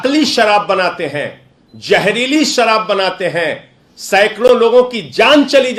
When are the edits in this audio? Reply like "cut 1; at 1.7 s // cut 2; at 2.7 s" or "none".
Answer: none